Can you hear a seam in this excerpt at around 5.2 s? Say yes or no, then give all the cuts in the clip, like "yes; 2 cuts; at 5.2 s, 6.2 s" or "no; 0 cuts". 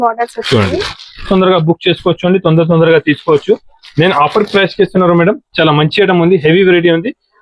no; 1 cut; at 1.3 s